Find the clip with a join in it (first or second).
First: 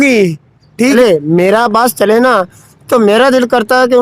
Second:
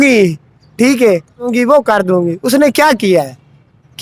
first